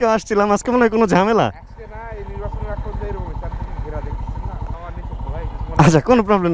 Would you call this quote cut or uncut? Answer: cut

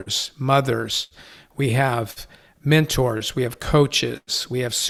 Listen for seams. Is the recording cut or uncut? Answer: uncut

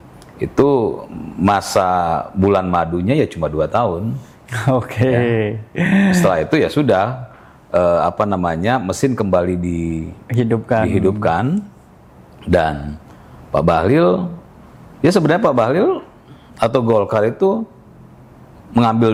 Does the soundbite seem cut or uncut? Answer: uncut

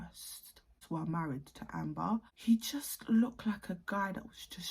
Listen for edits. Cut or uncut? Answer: cut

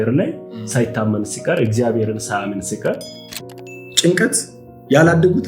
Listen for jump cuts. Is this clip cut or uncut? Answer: cut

